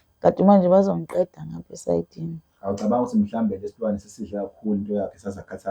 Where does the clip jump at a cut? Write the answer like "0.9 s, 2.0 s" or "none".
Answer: none